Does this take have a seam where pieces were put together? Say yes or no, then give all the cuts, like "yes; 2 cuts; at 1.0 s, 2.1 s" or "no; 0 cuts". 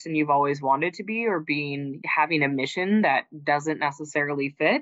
no; 0 cuts